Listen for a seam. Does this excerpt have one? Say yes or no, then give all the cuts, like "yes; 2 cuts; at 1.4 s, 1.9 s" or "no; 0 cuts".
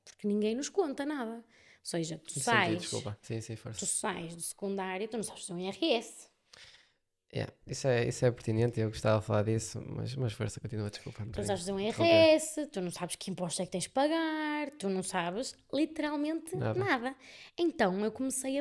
no; 0 cuts